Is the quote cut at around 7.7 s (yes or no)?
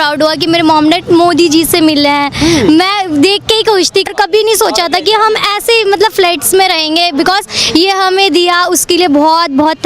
no